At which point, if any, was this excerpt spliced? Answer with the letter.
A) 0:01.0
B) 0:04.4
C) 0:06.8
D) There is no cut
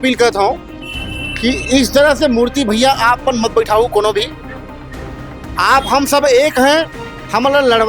D